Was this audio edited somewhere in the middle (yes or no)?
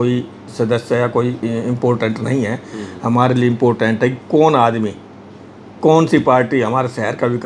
no